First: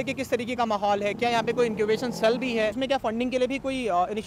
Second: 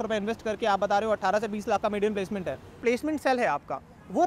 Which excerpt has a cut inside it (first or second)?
second